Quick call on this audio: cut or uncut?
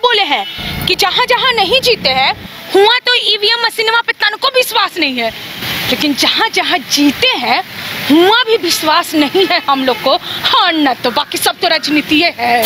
uncut